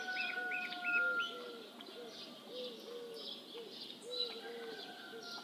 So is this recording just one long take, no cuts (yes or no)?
yes